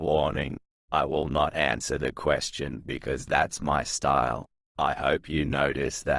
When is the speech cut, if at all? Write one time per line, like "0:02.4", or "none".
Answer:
none